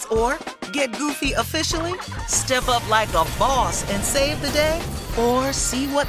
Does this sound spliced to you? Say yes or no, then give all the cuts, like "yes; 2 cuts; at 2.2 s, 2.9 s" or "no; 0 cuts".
no; 0 cuts